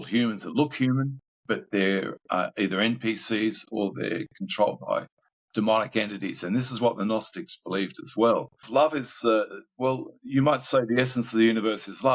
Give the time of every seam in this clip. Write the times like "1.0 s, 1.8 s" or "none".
8.7 s

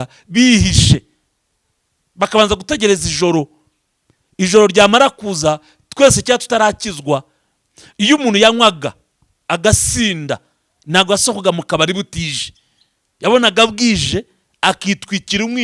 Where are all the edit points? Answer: none

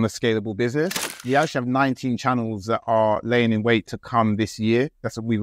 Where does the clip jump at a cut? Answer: 1.2 s

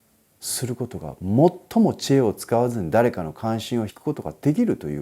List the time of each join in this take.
3.9 s

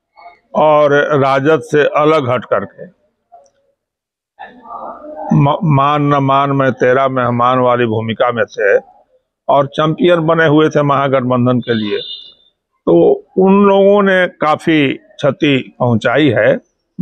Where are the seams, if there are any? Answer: none

